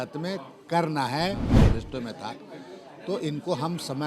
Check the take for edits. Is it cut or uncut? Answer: cut